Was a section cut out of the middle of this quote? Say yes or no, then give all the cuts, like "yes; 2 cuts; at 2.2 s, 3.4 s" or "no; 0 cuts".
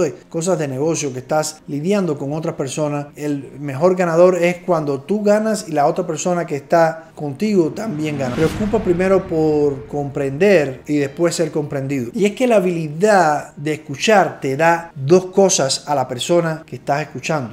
yes; 2 cuts; at 8.3 s, 12.1 s